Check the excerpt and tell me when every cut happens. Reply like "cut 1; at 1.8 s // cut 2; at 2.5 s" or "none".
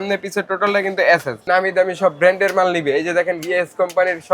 cut 1; at 1.4 s